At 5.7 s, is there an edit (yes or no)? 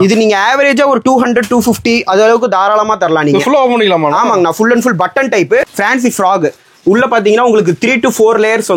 yes